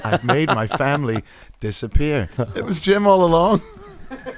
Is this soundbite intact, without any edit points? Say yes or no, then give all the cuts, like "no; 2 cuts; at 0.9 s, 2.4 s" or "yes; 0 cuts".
no; 1 cut; at 2.4 s